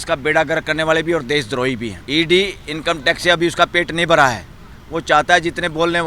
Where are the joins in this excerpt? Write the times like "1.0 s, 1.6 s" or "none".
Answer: 2.0 s